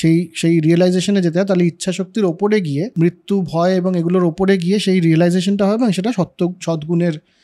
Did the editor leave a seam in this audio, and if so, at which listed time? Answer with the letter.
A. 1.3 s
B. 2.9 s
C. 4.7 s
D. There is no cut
B